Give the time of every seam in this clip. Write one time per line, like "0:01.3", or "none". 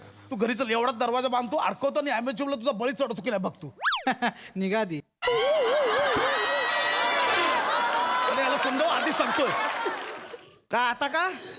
0:10.1